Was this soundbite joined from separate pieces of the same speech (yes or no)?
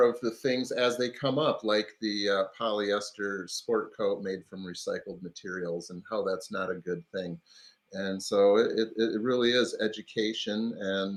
no